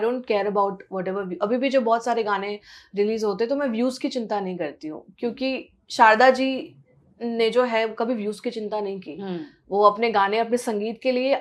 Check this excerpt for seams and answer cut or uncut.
uncut